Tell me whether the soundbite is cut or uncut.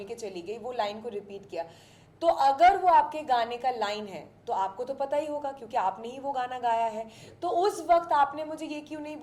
uncut